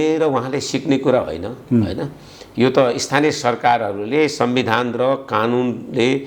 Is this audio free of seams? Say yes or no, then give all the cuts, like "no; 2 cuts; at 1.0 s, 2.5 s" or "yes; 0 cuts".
yes; 0 cuts